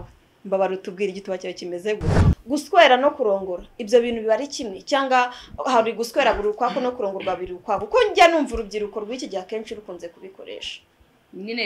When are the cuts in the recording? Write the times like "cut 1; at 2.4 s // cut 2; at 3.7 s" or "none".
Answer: cut 1; at 2.1 s